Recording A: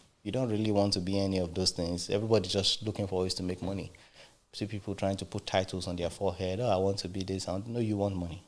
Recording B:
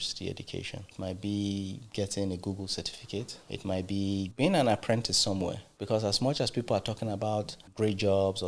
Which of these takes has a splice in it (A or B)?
B